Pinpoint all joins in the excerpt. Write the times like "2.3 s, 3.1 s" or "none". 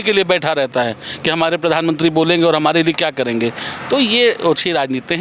none